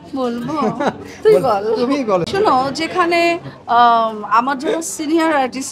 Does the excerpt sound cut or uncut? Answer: cut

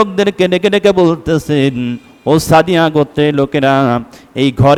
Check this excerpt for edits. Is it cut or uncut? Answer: uncut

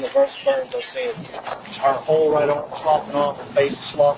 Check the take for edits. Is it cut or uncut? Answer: cut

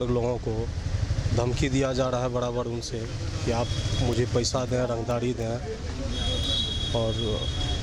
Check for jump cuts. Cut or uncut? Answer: uncut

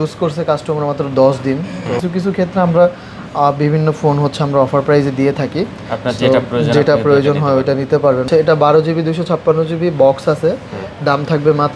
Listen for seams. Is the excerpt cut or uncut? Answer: cut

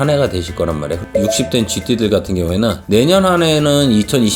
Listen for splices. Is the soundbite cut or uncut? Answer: cut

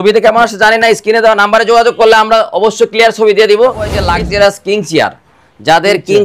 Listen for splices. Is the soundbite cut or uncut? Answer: cut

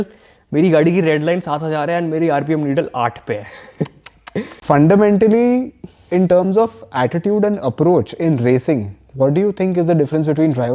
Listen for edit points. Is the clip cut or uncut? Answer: cut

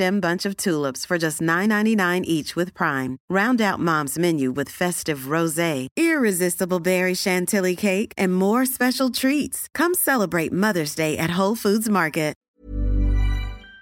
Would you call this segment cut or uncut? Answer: cut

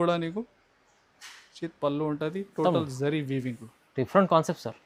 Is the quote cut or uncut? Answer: uncut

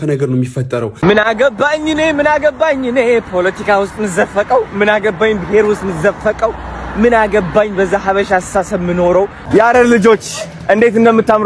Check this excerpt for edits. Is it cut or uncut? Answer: cut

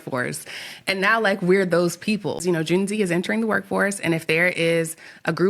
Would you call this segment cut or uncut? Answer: cut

